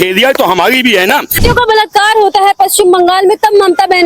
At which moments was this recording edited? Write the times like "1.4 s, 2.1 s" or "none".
1.4 s

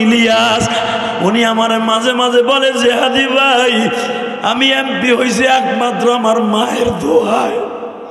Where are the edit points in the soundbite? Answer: none

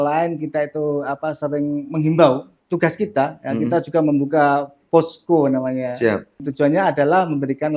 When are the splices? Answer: 2.5 s, 6.5 s

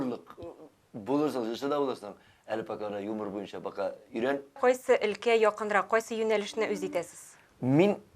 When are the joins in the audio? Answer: 4.6 s

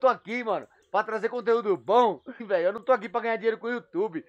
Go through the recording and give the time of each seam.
2.5 s

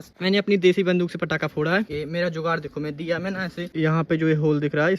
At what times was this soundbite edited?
1.9 s, 3.7 s

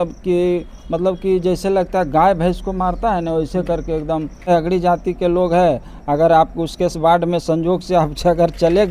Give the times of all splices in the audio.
4.5 s

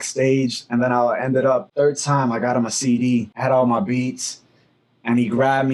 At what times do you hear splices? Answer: 1.7 s, 3.3 s

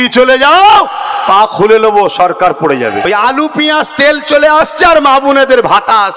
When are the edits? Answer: 3.0 s

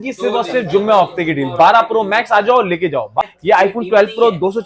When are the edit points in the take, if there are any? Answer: 3.2 s

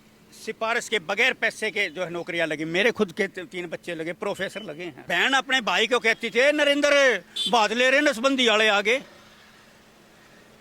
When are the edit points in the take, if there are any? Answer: 4.9 s

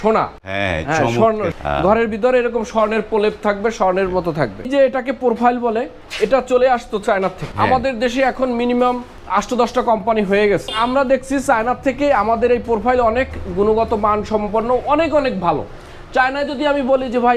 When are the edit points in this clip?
1.5 s, 4.7 s, 6.0 s, 7.4 s, 9.1 s, 10.7 s

